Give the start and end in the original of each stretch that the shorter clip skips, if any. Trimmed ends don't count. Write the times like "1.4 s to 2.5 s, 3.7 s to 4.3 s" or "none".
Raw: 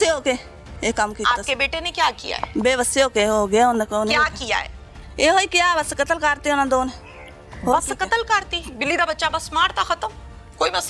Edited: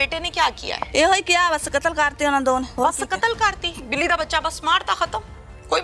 2.4 s to 5.1 s, 6.9 s to 7.6 s